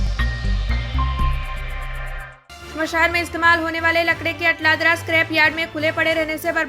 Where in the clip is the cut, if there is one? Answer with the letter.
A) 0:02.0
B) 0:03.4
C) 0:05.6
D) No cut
A